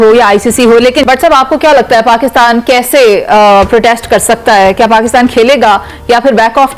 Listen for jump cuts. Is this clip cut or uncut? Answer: cut